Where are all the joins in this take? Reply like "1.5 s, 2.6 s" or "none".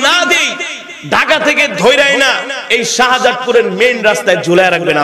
none